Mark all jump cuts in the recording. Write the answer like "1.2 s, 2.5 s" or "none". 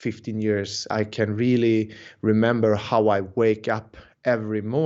0.9 s